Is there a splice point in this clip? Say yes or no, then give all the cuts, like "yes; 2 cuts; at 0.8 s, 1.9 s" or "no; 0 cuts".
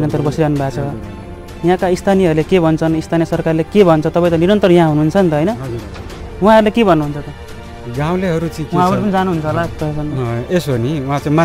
no; 0 cuts